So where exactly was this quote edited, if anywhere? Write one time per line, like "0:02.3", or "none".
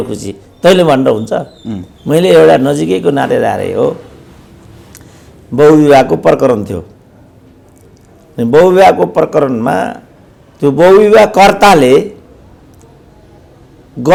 none